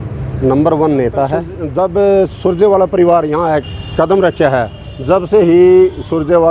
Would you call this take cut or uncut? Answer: cut